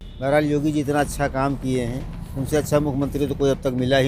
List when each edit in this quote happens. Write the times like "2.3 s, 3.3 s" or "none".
none